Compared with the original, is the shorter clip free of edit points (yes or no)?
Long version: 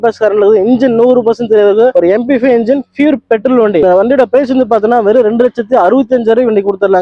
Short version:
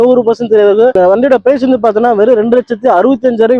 no